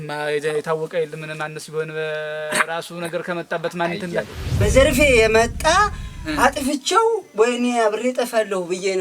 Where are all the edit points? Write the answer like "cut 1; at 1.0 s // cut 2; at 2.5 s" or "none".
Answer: cut 1; at 4.6 s